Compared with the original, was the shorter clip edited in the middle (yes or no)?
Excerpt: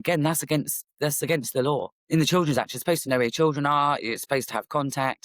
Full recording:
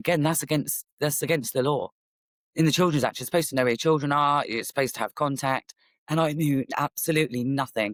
yes